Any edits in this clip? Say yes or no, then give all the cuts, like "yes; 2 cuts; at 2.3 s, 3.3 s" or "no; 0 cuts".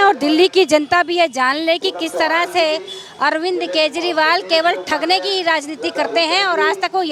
no; 0 cuts